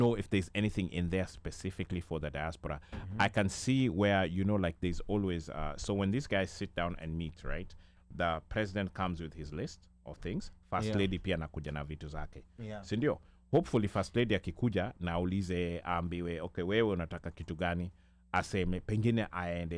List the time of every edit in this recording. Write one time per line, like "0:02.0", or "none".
none